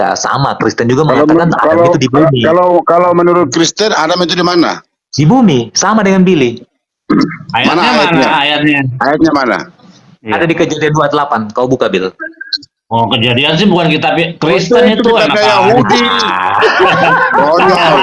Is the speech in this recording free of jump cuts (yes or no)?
yes